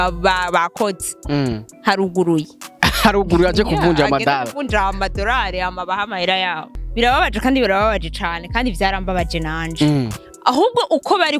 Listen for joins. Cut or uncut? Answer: cut